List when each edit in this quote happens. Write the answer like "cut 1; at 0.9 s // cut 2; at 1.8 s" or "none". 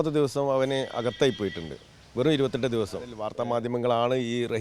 cut 1; at 3.2 s